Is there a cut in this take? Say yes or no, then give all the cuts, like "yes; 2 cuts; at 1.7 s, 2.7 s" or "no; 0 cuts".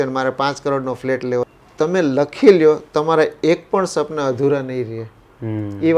yes; 1 cut; at 1.5 s